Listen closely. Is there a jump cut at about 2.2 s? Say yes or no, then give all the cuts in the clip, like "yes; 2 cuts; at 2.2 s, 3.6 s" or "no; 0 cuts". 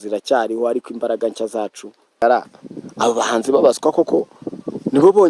yes; 1 cut; at 2.2 s